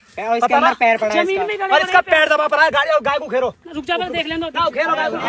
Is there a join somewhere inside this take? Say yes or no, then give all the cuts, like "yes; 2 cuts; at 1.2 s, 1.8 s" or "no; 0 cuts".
no; 0 cuts